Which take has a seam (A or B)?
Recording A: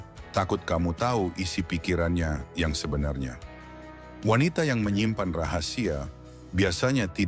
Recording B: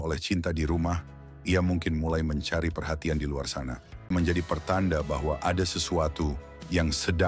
B